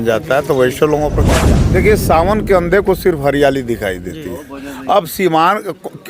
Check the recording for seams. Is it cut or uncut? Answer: cut